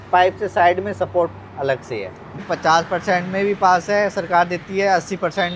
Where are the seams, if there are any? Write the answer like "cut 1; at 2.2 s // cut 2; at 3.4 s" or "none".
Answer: cut 1; at 2.4 s